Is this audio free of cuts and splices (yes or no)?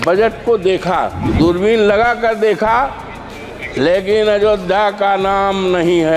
no